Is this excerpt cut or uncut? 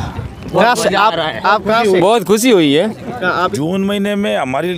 cut